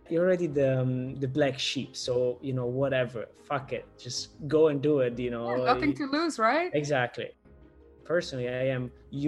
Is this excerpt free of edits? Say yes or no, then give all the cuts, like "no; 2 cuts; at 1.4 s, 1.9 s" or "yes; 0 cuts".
no; 1 cut; at 7.4 s